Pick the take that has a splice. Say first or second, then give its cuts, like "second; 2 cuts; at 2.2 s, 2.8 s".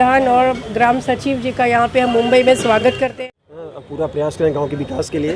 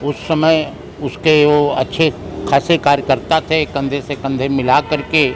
first; 1 cut; at 3.1 s